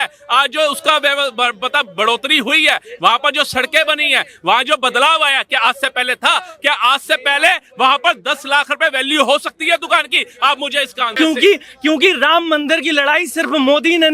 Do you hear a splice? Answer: yes; 1 cut; at 11.1 s

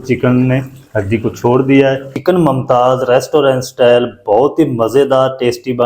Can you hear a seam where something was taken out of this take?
yes; 1 cut; at 2.1 s

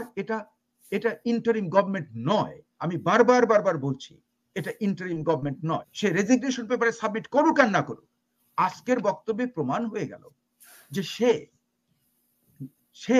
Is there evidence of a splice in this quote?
yes; 1 cut; at 5.9 s

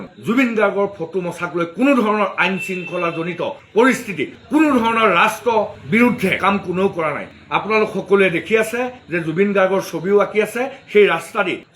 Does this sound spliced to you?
no; 0 cuts

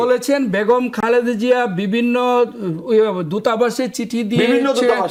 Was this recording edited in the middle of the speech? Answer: no; 0 cuts

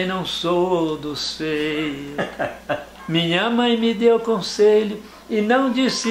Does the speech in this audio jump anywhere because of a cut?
yes; 1 cut; at 2.9 s

